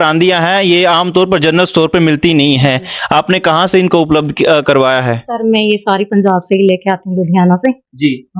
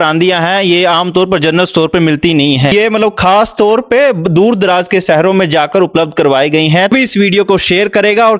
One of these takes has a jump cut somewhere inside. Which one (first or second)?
second